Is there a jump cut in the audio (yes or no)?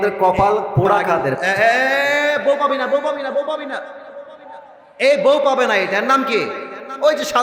yes